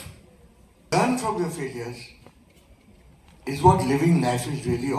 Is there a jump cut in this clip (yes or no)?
yes